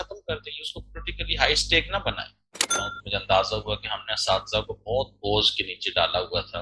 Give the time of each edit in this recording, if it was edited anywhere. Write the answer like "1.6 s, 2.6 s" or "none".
2.7 s